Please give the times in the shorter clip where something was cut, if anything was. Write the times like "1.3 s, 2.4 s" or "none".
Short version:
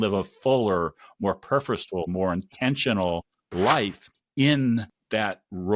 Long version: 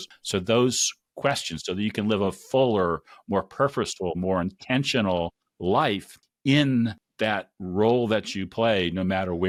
none